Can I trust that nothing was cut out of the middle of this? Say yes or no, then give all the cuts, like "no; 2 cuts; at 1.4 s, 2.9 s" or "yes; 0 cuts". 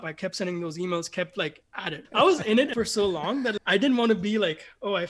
no; 2 cuts; at 2.1 s, 3.5 s